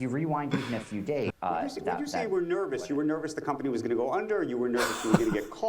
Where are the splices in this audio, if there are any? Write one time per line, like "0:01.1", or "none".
0:01.3